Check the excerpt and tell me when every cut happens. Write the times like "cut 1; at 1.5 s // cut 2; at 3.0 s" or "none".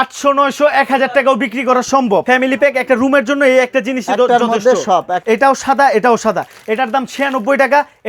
cut 1; at 2.2 s // cut 2; at 5.1 s